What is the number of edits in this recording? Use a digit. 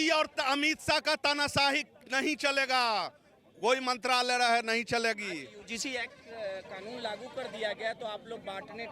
0